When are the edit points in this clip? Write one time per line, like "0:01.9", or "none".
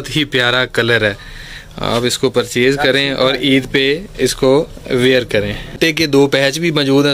0:05.8